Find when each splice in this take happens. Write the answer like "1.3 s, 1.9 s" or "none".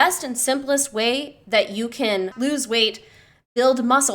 2.3 s